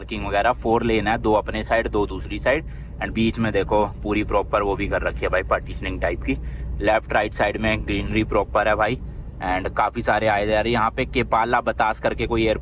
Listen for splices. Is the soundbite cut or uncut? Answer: uncut